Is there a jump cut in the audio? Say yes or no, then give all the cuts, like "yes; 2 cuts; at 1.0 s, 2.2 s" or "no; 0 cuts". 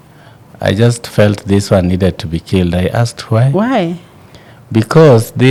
no; 0 cuts